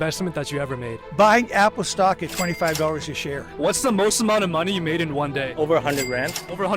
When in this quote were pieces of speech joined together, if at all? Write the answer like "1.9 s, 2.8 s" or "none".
1.0 s, 3.5 s